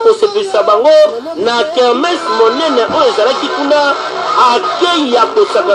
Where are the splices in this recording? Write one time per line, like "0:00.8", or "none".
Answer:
none